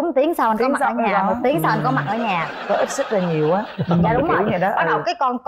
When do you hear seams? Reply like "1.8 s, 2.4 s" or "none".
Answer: none